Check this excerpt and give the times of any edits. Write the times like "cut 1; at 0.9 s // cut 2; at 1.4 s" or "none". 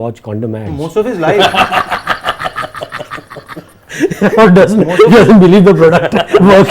none